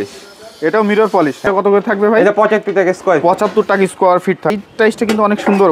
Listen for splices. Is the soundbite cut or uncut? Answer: cut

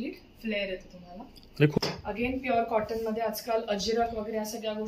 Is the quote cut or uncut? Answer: cut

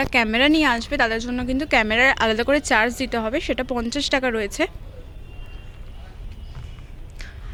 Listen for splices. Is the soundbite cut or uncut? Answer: uncut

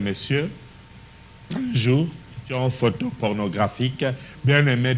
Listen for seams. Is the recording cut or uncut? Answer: cut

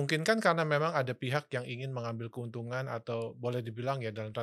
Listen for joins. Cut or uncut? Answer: uncut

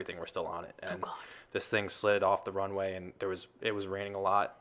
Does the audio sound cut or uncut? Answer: uncut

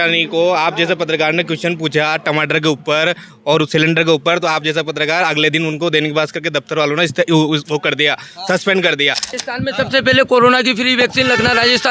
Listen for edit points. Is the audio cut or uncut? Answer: cut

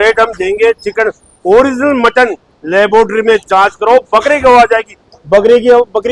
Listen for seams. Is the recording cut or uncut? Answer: uncut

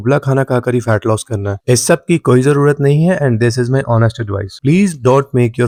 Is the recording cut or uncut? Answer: uncut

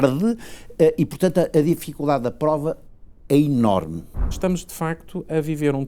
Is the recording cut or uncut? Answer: cut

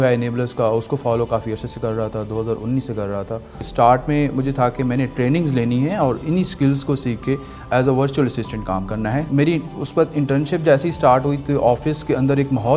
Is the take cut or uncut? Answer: cut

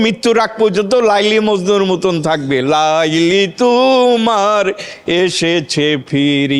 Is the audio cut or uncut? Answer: uncut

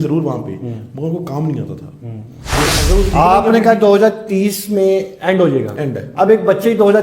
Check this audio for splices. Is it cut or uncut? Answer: cut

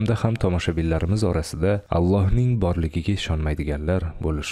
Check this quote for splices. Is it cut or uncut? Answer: uncut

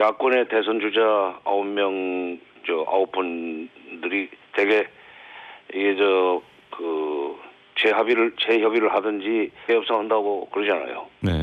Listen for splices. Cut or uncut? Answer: uncut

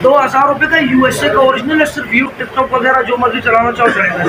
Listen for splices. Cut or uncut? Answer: cut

